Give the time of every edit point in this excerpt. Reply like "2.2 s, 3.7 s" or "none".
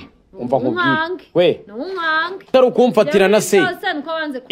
2.5 s

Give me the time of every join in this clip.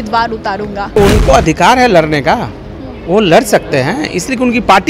1.0 s

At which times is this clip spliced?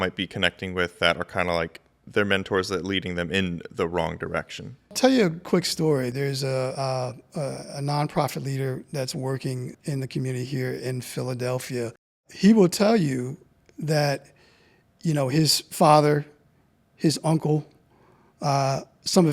4.9 s, 6.1 s, 9.7 s, 12.3 s

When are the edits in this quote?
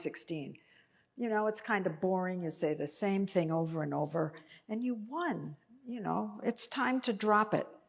4.9 s

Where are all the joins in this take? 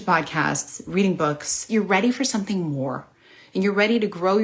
1.7 s

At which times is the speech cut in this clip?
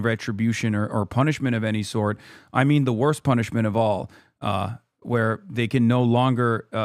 none

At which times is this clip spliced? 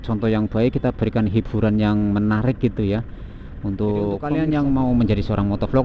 4.3 s

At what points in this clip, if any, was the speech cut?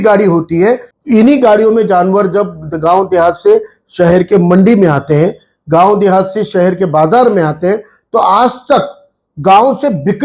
0.9 s

